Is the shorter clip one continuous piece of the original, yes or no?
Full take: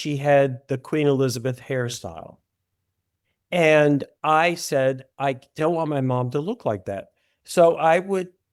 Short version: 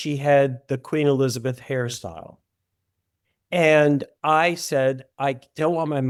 yes